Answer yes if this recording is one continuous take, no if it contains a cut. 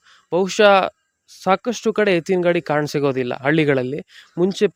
yes